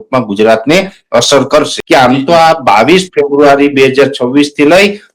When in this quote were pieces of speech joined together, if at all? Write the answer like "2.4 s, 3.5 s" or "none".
1.8 s